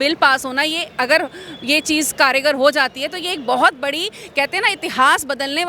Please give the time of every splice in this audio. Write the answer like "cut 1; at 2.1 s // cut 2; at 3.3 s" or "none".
none